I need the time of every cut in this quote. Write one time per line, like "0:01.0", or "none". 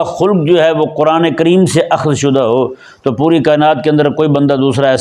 none

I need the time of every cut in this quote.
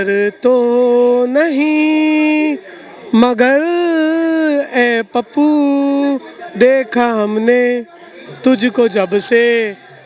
none

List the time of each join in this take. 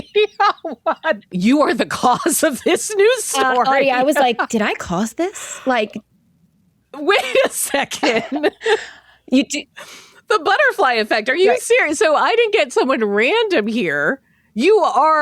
0:01.3

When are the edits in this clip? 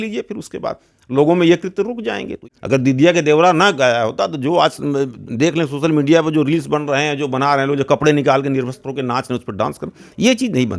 0:02.3

